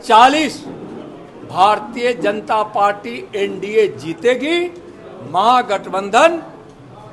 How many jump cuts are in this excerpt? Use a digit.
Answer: 0